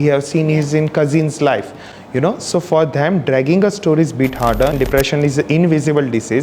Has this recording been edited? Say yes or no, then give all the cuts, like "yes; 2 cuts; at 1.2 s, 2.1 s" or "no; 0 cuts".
yes; 1 cut; at 4.7 s